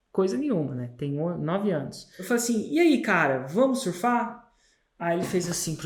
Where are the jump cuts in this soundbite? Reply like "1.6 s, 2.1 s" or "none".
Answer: 2.1 s